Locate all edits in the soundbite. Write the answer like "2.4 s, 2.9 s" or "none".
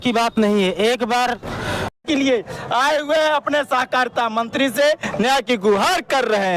1.8 s